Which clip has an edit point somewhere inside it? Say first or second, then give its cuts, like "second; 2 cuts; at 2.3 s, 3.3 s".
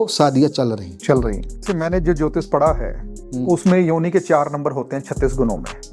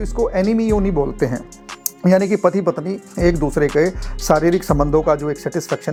first; 1 cut; at 1.6 s